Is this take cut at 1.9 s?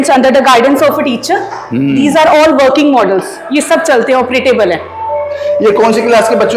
no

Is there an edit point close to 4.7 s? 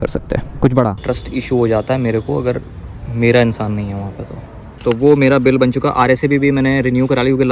yes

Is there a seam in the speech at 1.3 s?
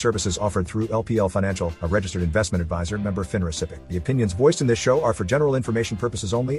no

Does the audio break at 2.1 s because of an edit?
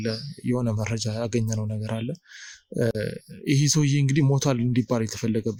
no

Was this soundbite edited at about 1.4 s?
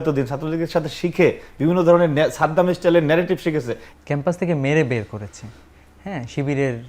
no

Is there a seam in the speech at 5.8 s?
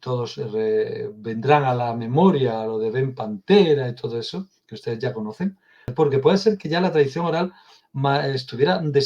yes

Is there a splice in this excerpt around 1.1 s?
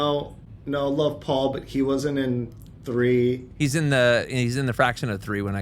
no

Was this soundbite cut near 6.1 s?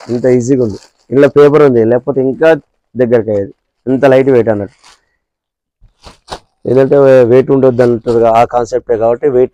no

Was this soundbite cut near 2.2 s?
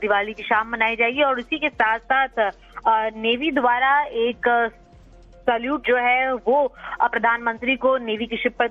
yes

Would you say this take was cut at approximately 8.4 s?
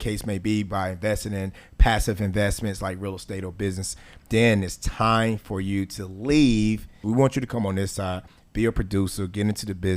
no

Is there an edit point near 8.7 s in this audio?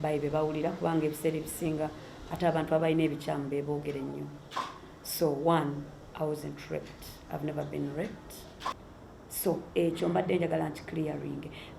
yes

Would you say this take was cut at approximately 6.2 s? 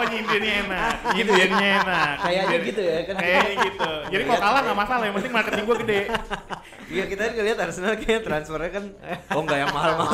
no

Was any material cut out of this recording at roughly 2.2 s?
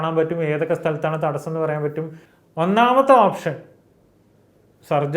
yes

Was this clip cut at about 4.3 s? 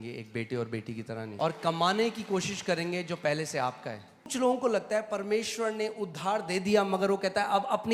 yes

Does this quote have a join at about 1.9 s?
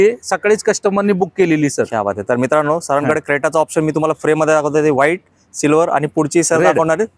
no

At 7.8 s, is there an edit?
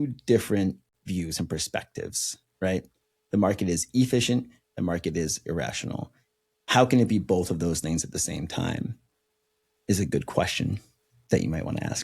no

